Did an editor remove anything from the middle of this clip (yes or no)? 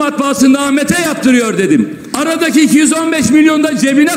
yes